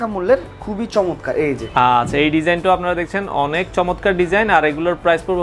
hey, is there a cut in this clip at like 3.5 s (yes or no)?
no